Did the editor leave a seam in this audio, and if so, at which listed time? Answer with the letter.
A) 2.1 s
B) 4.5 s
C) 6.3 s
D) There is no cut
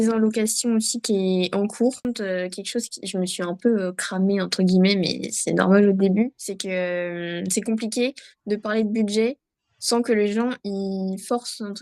A